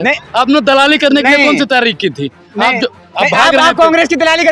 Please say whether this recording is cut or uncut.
uncut